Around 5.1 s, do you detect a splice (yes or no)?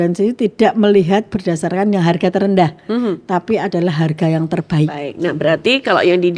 yes